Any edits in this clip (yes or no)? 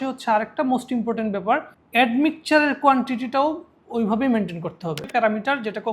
yes